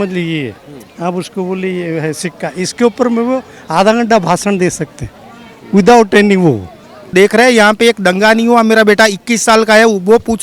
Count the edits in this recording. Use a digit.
1